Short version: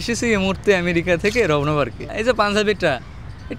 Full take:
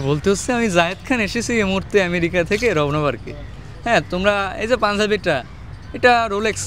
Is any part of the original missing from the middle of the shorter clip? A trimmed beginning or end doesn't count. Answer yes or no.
yes